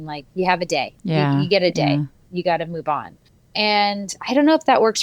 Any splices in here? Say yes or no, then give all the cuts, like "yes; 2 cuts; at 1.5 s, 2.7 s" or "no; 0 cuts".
yes; 2 cuts; at 1.0 s, 2.2 s